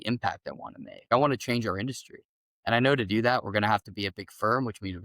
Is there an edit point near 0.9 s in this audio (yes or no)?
yes